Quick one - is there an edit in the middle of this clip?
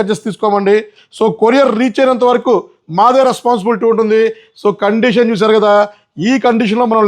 no; 0 cuts

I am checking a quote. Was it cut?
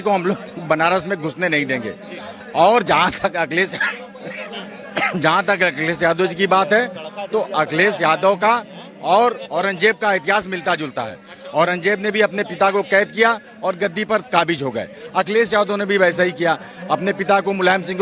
no; 0 cuts

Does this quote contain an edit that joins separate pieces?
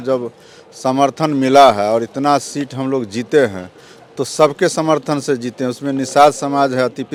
no; 0 cuts

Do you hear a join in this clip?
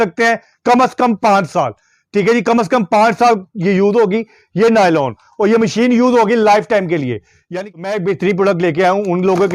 yes; 1 cut; at 7.4 s

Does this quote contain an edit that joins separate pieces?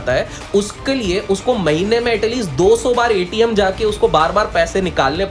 no; 0 cuts

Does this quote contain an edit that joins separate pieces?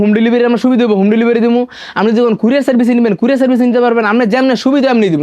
no; 0 cuts

